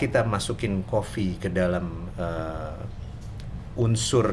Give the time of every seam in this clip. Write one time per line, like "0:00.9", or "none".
none